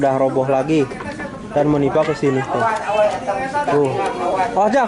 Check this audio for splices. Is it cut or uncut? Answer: uncut